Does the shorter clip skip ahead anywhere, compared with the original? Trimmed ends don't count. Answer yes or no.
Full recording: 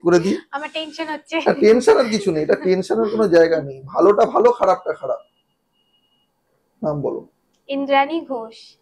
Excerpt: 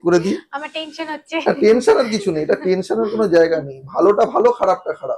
no